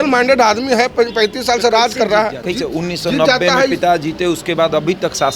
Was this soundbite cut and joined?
yes; 1 cut; at 2.4 s

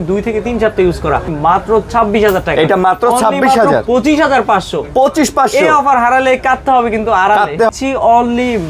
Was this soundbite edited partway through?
yes; 2 cuts; at 1.3 s, 7.7 s

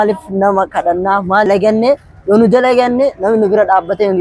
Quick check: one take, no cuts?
no; 1 cut; at 1.5 s

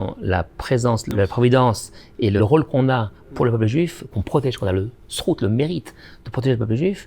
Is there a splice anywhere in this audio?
yes; 3 cuts; at 1.1 s, 2.4 s, 4.1 s

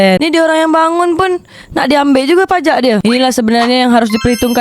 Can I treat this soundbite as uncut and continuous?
no; 1 cut; at 3.0 s

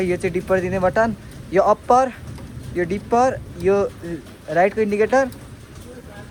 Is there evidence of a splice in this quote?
no; 0 cuts

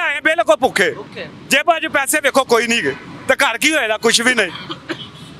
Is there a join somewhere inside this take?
no; 0 cuts

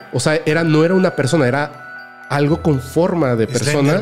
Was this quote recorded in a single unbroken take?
yes; 0 cuts

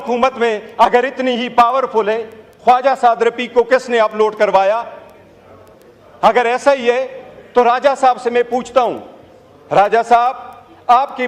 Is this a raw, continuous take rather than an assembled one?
yes; 0 cuts

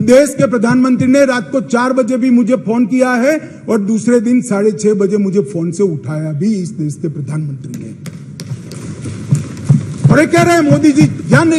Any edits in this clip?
no; 0 cuts

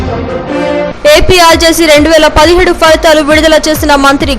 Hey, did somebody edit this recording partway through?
yes; 1 cut; at 0.9 s

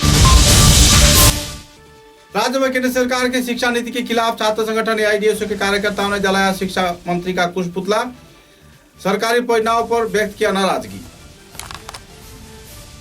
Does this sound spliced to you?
yes; 1 cut; at 1.2 s

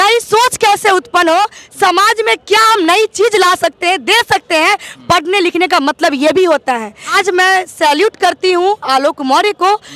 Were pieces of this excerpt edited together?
yes; 1 cut; at 7.0 s

